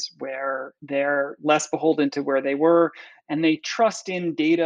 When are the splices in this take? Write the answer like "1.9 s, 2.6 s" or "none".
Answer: none